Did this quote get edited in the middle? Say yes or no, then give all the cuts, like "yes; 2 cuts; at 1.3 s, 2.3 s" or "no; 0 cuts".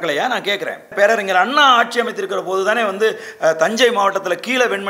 yes; 1 cut; at 0.9 s